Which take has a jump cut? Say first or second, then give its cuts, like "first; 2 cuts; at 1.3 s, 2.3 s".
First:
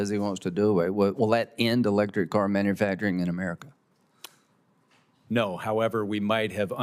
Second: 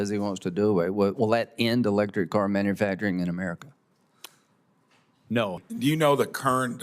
second; 1 cut; at 5.6 s